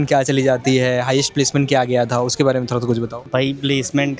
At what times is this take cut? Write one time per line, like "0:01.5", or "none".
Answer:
none

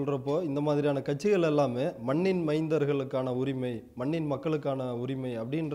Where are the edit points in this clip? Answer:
none

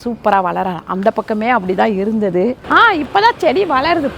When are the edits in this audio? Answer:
0:02.6

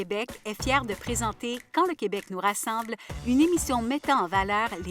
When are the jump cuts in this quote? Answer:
none

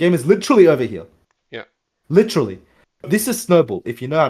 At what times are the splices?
0:03.1

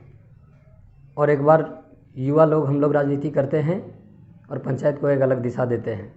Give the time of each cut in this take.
none

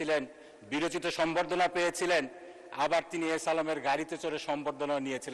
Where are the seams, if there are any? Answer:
none

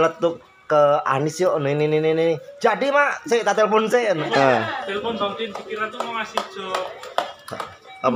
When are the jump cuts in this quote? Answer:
0:04.2

